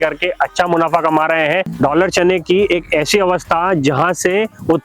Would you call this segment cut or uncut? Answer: cut